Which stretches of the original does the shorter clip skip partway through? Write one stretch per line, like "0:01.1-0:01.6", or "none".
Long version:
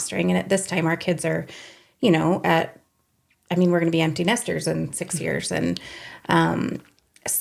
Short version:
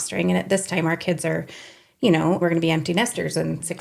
0:02.4-0:03.7